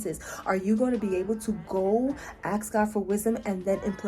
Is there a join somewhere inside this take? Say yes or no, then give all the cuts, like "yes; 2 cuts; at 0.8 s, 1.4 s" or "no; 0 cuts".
no; 0 cuts